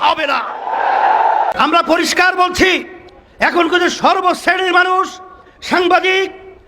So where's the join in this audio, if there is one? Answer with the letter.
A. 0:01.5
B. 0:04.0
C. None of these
A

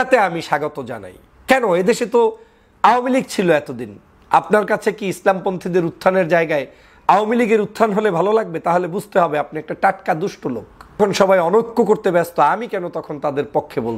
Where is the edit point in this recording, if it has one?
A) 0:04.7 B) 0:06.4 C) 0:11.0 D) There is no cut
C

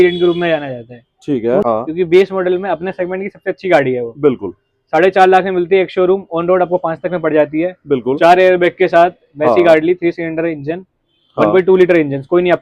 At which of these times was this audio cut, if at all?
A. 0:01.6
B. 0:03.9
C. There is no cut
A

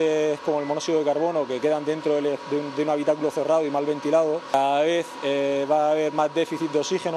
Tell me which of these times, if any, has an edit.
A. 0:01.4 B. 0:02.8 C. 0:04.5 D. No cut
C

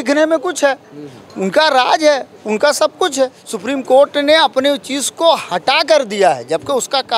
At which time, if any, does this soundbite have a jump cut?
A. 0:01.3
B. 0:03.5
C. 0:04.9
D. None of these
B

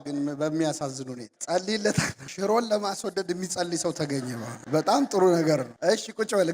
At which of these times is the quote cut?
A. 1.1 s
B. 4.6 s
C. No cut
C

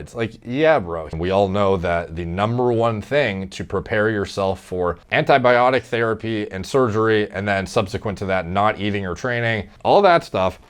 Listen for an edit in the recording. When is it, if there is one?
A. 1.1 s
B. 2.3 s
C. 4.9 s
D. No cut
A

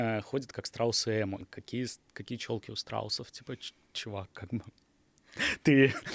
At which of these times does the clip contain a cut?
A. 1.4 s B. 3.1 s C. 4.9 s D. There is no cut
A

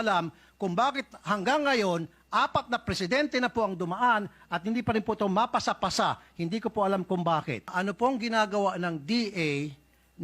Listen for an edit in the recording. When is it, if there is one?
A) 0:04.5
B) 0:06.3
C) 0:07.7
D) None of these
C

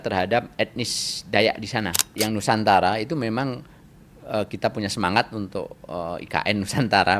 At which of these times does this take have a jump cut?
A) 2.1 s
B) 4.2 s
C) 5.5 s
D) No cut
A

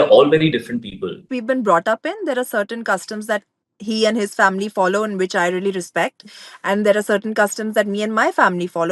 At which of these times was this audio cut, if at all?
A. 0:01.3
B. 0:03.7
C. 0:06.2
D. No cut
A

